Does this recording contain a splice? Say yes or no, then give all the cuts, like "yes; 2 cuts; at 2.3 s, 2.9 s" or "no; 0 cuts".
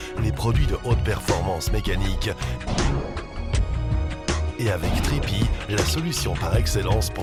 no; 0 cuts